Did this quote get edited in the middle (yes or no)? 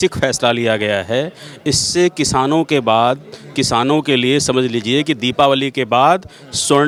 no